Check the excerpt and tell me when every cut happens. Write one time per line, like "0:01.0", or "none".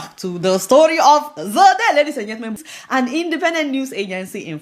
0:02.7

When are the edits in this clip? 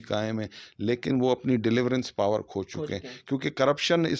none

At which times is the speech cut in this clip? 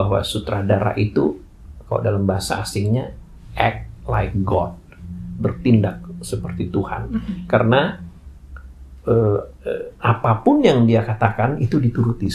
none

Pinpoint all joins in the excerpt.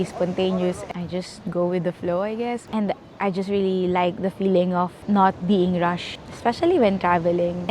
0:02.6

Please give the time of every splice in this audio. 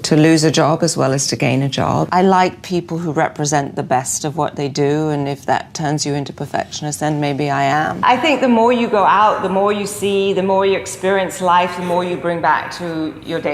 0:02.1
0:08.0

